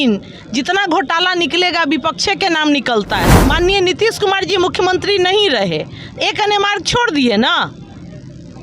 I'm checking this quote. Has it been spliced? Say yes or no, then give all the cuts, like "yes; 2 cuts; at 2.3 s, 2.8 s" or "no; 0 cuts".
yes; 1 cut; at 3.4 s